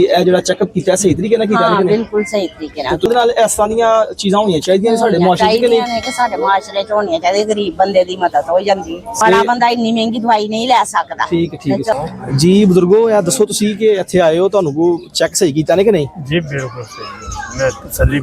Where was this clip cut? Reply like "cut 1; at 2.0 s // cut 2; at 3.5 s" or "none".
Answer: cut 1; at 3.1 s // cut 2; at 9.2 s // cut 3; at 11.9 s